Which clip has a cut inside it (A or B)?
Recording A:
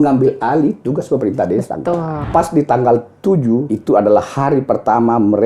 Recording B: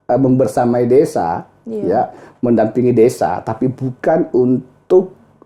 A